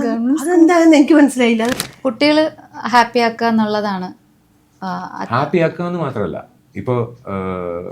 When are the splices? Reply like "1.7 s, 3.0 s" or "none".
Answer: 1.7 s